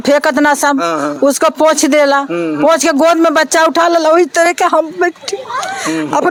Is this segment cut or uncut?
uncut